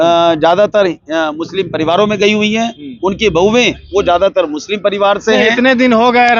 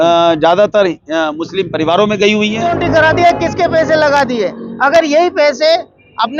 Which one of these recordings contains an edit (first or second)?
second